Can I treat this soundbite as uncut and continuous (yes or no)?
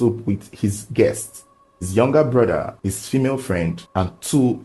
no